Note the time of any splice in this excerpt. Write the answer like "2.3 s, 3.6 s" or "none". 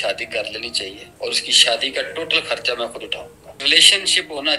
1.0 s, 3.6 s